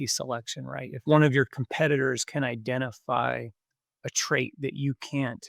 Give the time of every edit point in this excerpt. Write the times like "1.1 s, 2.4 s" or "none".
1.0 s